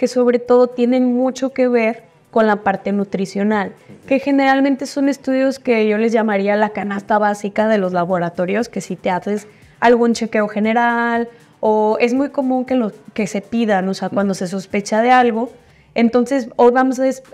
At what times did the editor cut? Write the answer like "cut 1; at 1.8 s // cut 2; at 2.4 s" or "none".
none